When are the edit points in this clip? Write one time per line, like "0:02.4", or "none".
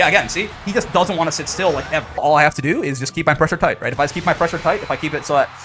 0:02.2